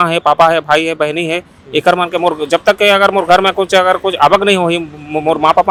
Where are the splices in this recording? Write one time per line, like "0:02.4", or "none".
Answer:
none